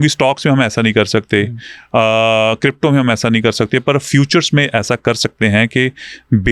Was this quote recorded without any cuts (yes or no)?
yes